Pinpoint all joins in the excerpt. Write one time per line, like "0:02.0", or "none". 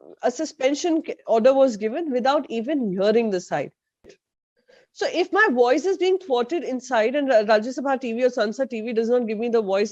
0:04.1